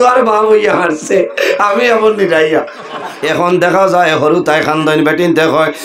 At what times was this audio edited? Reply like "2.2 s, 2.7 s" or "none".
3.1 s